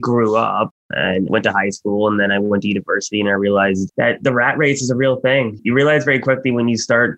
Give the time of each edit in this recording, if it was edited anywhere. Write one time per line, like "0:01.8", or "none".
0:01.3
0:05.6